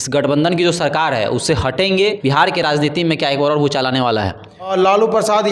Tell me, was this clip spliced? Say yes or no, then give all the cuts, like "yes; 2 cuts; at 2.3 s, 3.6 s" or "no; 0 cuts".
yes; 2 cuts; at 2.2 s, 4.7 s